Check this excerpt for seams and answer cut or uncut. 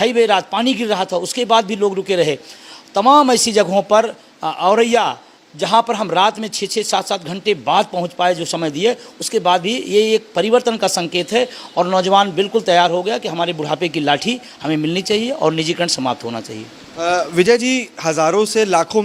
uncut